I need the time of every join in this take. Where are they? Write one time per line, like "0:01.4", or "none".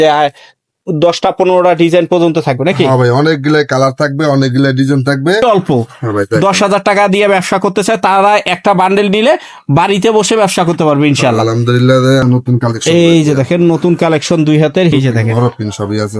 0:05.4
0:12.2
0:14.9